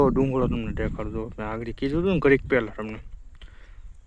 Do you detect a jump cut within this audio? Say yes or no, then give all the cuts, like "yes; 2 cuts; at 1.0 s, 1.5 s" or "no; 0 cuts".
no; 0 cuts